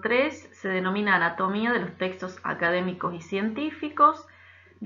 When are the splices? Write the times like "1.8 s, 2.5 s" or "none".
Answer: none